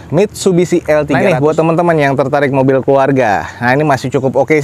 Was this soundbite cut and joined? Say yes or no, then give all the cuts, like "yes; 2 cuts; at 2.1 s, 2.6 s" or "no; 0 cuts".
yes; 1 cut; at 1.2 s